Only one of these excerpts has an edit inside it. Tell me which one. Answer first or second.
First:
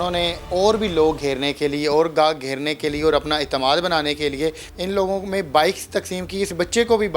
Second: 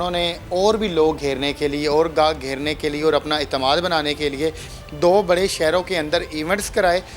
first